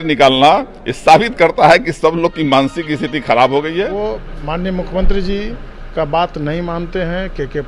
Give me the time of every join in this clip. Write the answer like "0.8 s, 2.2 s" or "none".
3.9 s